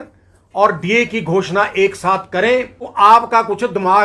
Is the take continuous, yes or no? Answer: no